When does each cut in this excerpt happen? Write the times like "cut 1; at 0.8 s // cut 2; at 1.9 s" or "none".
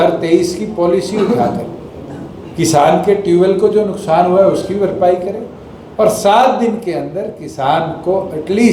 none

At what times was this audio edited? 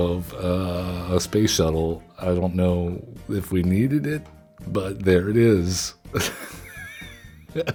none

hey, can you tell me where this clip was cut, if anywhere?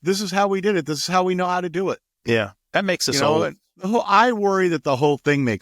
cut 1; at 3.7 s

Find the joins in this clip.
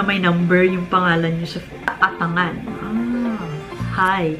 cut 1; at 1.9 s

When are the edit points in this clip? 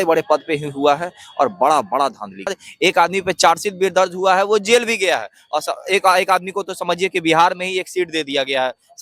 cut 1; at 2.6 s

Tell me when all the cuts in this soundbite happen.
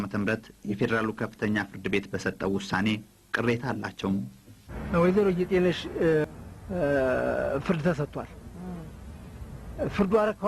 cut 1; at 6.3 s

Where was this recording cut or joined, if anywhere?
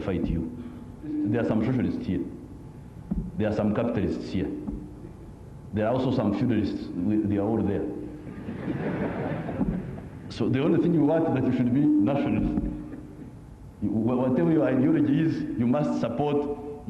cut 1; at 1.1 s

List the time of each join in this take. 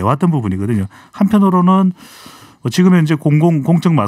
none

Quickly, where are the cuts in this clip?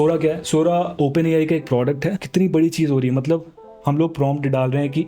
cut 1; at 0.9 s // cut 2; at 2.2 s

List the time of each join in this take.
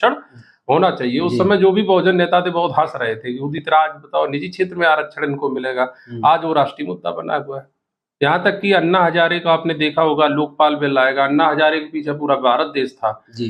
none

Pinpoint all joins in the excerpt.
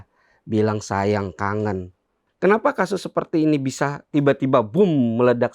cut 1; at 2.2 s

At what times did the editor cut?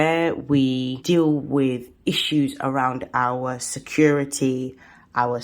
cut 1; at 1.0 s

